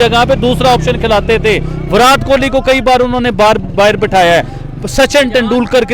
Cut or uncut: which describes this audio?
uncut